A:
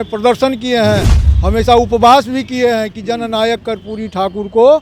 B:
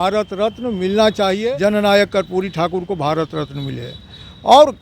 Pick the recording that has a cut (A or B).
B